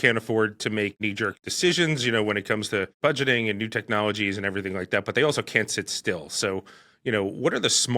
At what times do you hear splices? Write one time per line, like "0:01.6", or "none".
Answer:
0:01.2